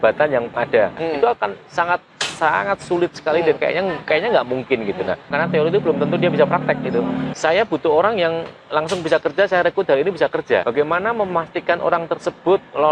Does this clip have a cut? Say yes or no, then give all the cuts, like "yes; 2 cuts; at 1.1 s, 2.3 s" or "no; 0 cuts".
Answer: yes; 4 cuts; at 1.0 s, 5.3 s, 7.3 s, 10.6 s